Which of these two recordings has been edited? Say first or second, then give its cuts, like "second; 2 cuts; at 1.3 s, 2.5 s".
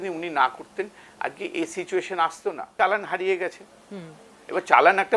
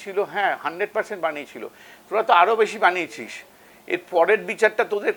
first; 1 cut; at 2.6 s